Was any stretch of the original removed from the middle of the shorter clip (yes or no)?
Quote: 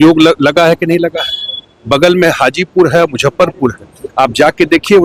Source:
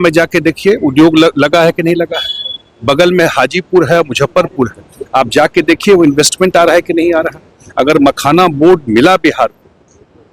no